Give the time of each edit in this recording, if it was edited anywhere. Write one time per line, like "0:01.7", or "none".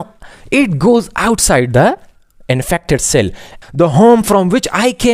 0:03.5